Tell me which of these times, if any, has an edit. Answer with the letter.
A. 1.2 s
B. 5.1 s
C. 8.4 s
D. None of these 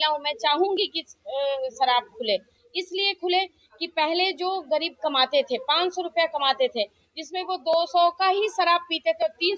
D